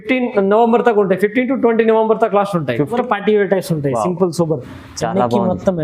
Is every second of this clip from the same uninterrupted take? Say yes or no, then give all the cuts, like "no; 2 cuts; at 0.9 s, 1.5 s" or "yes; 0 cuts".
no; 1 cut; at 2.9 s